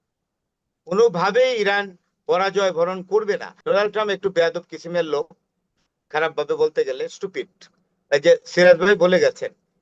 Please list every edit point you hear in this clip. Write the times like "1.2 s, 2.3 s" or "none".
3.5 s